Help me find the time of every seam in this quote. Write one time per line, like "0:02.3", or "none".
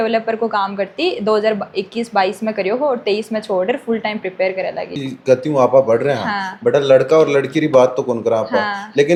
none